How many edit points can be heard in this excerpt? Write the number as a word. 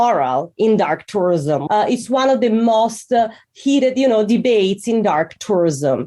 one